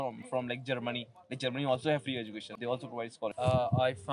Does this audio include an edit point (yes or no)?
yes